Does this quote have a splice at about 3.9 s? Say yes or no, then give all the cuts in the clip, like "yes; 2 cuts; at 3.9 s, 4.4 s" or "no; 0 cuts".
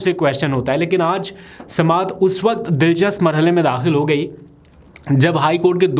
no; 0 cuts